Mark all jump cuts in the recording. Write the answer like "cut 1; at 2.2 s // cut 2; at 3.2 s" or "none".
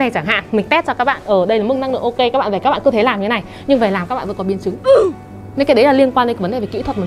none